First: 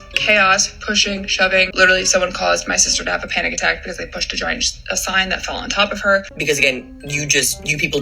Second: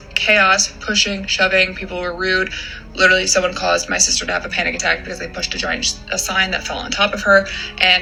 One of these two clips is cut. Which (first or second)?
first